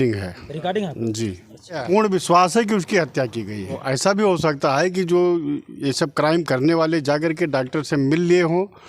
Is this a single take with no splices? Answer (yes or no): no